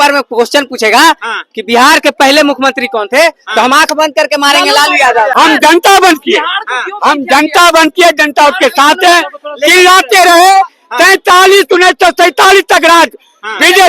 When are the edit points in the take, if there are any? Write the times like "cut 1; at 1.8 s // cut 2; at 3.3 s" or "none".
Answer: cut 1; at 5.3 s

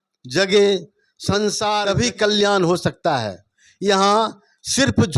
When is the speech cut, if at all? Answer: none

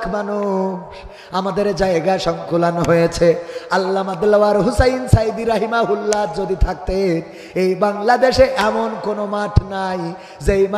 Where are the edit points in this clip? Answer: none

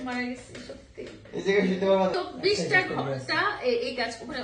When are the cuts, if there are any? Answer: cut 1; at 2.1 s

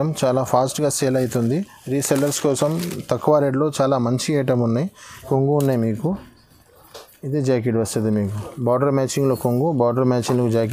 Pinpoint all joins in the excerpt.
cut 1; at 5.2 s

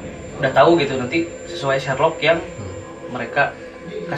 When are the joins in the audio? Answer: none

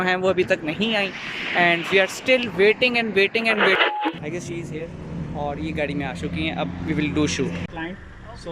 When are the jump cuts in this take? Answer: cut 1; at 3.8 s // cut 2; at 7.7 s

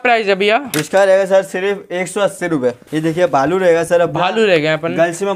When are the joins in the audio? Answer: cut 1; at 2.8 s

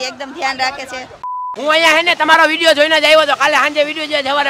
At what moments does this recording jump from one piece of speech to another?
cut 1; at 1.3 s

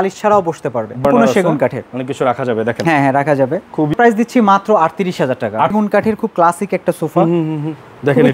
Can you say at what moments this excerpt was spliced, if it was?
cut 1; at 1.0 s // cut 2; at 3.9 s // cut 3; at 5.7 s

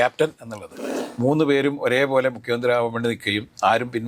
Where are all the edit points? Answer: cut 1; at 0.9 s

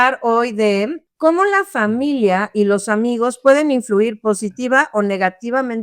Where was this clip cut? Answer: cut 1; at 1.0 s

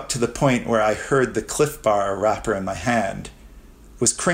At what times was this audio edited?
none

